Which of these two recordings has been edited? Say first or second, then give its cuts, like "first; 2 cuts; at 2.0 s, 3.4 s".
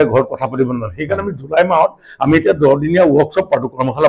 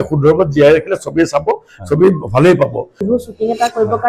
second; 1 cut; at 3.0 s